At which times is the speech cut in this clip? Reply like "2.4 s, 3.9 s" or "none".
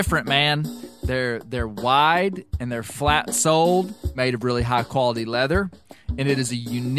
4.0 s